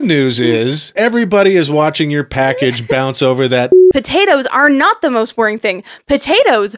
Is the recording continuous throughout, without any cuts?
no; 2 cuts; at 0.9 s, 3.8 s

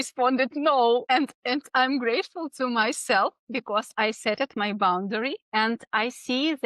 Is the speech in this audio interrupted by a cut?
yes; 2 cuts; at 1.0 s, 5.4 s

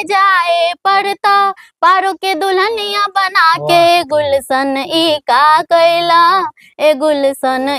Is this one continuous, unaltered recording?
yes; 0 cuts

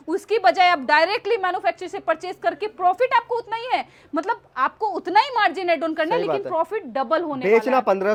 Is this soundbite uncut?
yes; 0 cuts

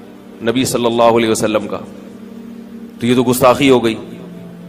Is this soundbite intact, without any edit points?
yes; 0 cuts

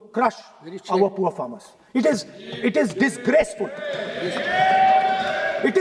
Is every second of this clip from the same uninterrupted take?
yes; 0 cuts

